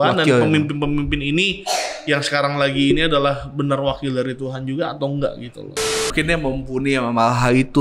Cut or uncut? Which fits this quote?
cut